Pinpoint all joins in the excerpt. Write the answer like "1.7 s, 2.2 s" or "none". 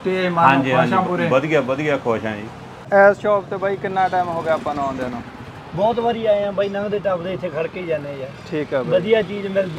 2.9 s